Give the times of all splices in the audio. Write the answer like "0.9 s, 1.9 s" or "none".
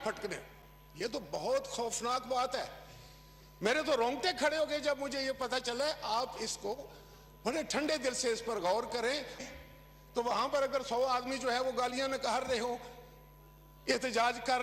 9.4 s